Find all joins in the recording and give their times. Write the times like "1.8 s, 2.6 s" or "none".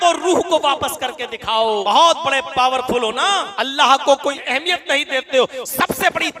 1.8 s, 3.5 s, 4.4 s